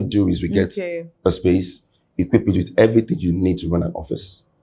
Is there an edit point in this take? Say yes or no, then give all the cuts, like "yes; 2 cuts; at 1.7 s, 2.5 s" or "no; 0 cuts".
no; 0 cuts